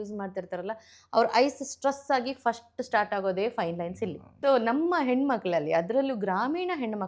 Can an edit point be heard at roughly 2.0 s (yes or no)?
no